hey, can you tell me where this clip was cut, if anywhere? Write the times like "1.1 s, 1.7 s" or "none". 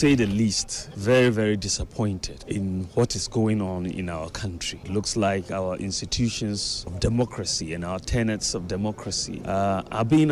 none